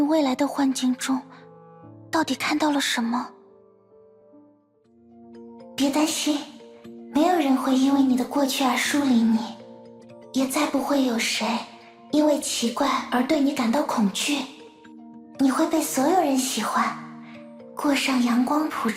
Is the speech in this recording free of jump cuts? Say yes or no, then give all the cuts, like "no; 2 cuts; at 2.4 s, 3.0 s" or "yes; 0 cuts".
no; 1 cut; at 5.1 s